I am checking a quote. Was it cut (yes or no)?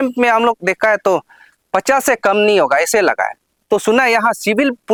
no